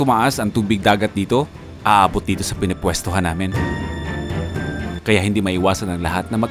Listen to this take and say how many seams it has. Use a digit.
0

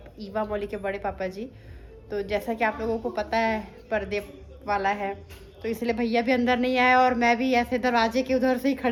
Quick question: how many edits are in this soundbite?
0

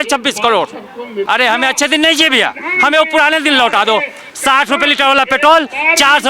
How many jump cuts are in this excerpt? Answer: 1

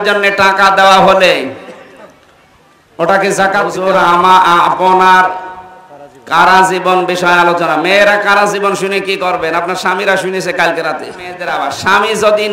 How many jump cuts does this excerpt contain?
2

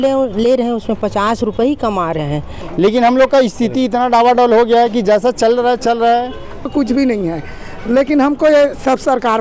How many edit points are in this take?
2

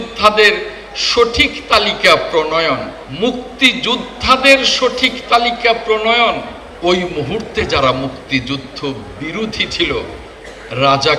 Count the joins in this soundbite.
2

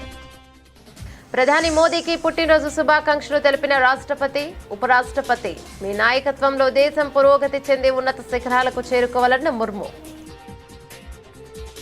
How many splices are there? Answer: 2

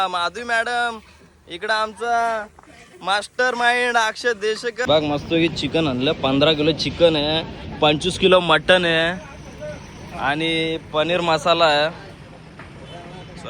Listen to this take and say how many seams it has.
1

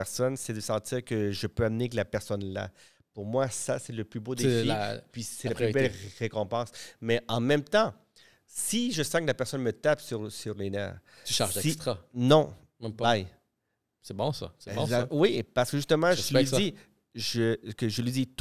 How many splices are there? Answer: 0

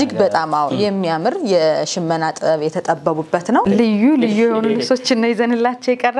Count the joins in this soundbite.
1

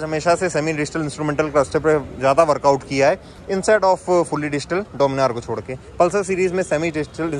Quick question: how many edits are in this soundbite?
0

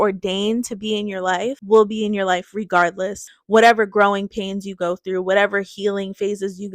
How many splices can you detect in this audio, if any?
2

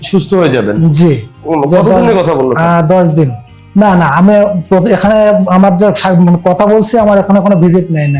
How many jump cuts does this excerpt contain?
1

